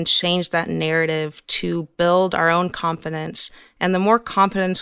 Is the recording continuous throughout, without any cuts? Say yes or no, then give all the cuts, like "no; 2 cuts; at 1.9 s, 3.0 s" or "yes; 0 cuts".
yes; 0 cuts